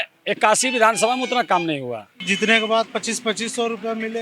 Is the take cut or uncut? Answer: cut